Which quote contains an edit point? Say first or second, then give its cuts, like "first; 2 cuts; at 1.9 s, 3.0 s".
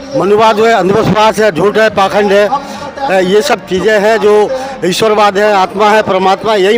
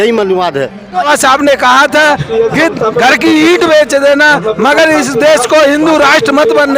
second; 1 cut; at 1.0 s